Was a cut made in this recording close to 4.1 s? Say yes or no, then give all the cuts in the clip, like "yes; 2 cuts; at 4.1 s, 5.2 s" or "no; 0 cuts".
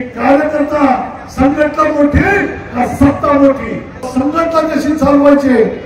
yes; 1 cut; at 4.1 s